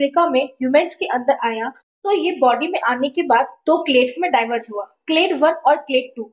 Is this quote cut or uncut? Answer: uncut